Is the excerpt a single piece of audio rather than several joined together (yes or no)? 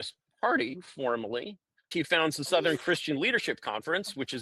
no